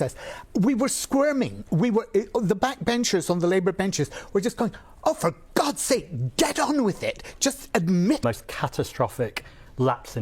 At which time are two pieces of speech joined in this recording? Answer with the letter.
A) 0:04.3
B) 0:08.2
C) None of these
B